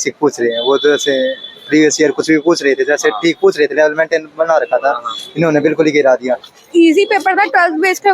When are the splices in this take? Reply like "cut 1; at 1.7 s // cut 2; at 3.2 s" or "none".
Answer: cut 1; at 6.5 s